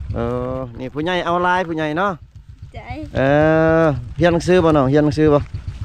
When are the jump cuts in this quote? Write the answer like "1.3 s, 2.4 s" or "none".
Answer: none